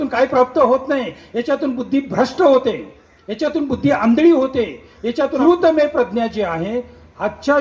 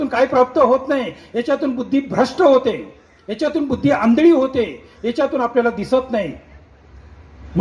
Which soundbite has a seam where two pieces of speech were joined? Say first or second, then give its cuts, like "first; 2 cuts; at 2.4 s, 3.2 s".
first; 1 cut; at 5.4 s